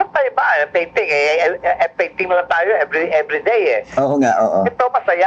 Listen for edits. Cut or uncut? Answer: uncut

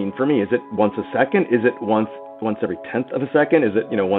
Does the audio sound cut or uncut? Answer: uncut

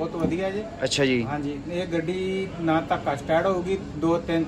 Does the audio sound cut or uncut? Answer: uncut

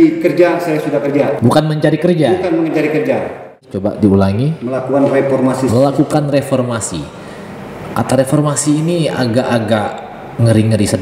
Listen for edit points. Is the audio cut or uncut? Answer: cut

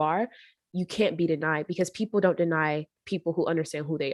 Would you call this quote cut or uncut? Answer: uncut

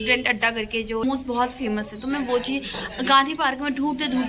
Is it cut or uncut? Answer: cut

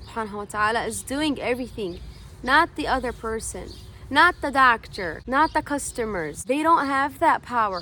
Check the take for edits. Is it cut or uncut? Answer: uncut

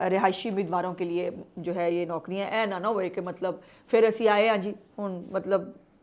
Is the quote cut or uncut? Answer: uncut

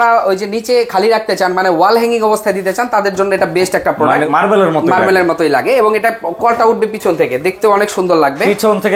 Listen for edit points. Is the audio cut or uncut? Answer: uncut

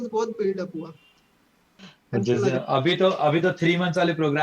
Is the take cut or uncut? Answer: cut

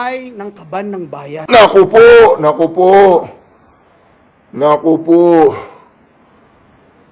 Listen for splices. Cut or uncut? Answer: uncut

